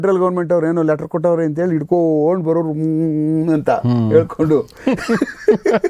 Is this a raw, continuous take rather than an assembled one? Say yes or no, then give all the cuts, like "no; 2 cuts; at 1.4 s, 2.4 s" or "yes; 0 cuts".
yes; 0 cuts